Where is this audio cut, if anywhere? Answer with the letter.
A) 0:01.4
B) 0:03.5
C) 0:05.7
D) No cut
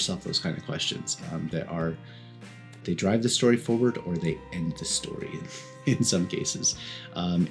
D